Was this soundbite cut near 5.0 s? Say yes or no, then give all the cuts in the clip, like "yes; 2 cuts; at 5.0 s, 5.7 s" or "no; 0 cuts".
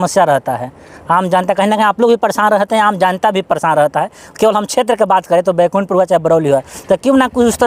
no; 0 cuts